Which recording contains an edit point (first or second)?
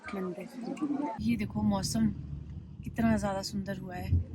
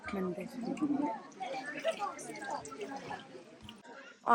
first